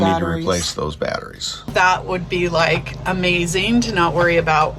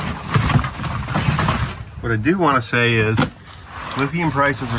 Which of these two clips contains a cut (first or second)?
first